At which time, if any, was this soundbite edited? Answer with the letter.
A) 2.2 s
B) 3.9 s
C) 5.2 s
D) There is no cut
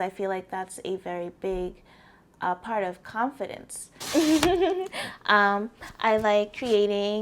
B